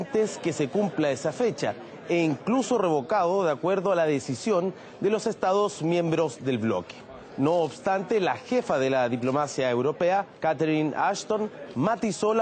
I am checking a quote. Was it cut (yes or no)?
yes